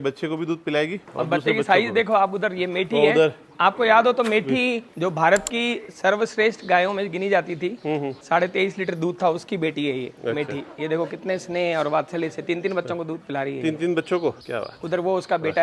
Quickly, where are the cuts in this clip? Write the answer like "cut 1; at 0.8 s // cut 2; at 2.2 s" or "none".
cut 1; at 1.0 s // cut 2; at 4.9 s // cut 3; at 8.2 s // cut 4; at 14.4 s